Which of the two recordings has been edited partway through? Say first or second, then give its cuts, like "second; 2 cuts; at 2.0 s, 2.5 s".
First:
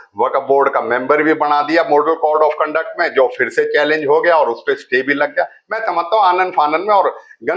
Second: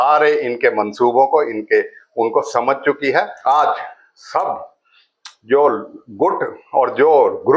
second; 1 cut; at 3.3 s